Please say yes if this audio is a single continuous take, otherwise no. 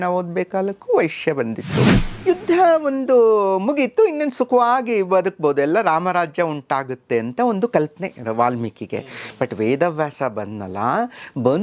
no